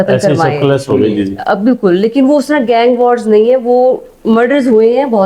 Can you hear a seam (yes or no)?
no